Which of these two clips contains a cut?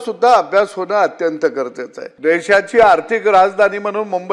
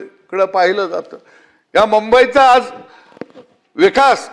first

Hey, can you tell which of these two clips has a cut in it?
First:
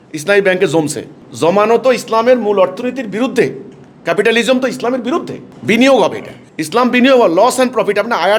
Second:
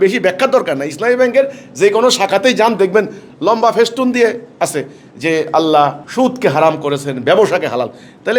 second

